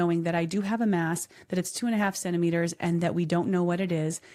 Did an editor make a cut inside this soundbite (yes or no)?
no